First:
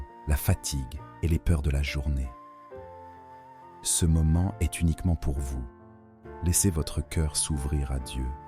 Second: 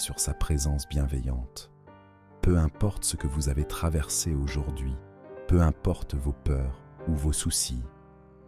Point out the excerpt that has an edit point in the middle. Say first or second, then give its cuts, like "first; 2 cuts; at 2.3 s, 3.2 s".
first; 2 cuts; at 2.3 s, 4.0 s